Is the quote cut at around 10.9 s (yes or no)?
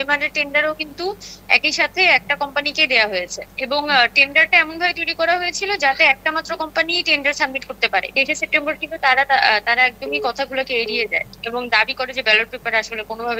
no